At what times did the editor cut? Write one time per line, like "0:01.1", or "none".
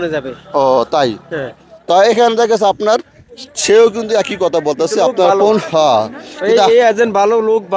none